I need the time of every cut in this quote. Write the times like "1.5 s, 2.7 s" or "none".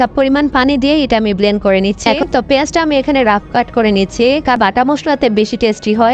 2.2 s, 4.6 s